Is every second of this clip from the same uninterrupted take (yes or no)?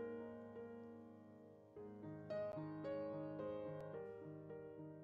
yes